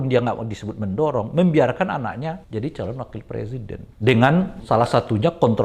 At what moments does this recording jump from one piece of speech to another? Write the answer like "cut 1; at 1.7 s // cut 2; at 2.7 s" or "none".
cut 1; at 2.4 s // cut 2; at 3.8 s // cut 3; at 4.6 s